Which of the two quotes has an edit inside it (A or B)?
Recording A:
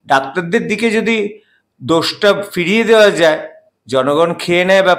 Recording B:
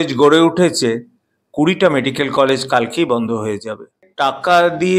B